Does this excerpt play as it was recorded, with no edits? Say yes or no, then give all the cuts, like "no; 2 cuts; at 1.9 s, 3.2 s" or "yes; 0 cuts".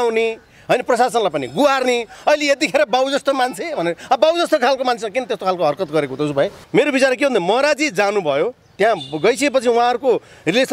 no; 1 cut; at 6.6 s